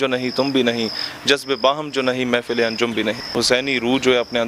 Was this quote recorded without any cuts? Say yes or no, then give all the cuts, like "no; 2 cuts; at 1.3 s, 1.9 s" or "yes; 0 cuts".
no; 1 cut; at 3.3 s